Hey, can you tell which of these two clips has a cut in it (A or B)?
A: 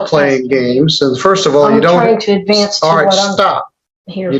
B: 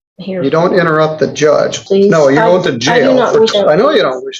B